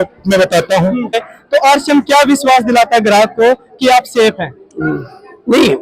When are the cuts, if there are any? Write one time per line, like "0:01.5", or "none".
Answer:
0:01.3